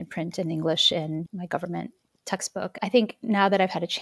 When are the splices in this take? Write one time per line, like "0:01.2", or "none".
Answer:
0:01.3